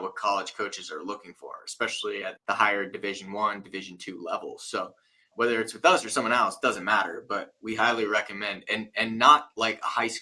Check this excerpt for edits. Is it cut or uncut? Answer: cut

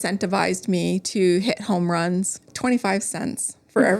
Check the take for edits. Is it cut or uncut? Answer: cut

